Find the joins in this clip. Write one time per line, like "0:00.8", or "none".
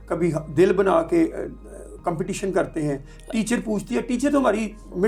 none